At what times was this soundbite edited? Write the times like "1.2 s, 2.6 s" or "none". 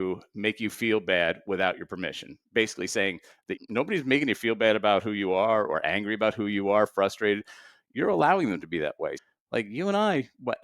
3.5 s, 9.2 s